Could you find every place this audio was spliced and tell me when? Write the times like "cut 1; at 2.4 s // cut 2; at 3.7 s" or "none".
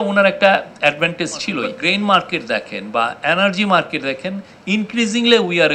cut 1; at 1.7 s